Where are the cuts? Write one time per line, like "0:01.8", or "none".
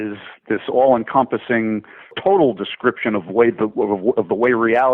0:02.2